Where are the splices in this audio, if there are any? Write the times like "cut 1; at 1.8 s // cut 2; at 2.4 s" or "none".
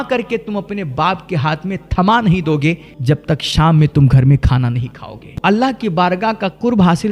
cut 1; at 2.9 s // cut 2; at 5.3 s